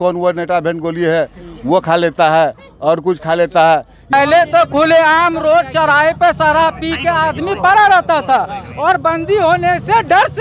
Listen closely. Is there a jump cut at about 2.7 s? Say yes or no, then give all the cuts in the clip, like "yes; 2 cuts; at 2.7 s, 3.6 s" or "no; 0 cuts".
no; 1 cut; at 4.1 s